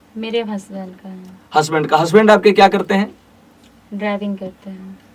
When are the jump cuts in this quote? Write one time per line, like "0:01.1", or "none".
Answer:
none